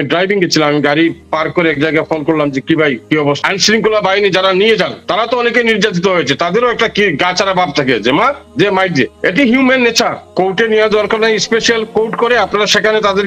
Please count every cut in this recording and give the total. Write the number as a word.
four